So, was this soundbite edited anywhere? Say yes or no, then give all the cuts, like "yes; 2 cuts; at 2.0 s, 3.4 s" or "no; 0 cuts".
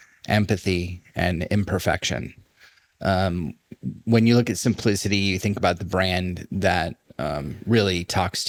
no; 0 cuts